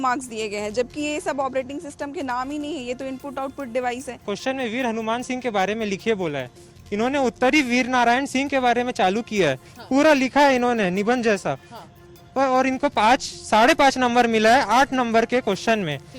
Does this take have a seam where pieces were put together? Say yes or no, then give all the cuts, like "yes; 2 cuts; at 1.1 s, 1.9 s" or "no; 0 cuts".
yes; 1 cut; at 4.1 s